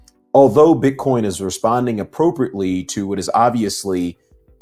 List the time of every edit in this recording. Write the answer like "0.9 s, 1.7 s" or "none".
none

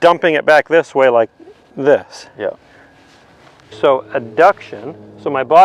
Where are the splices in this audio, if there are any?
3.6 s

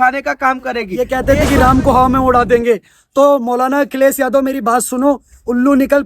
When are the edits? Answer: 0.9 s

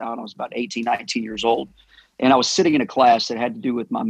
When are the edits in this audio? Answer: none

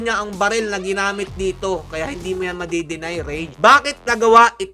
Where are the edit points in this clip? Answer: 1.9 s, 3.5 s

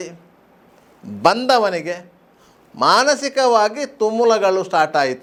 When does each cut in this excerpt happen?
none

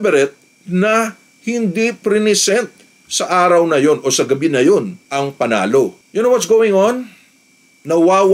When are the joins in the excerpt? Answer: 6.0 s

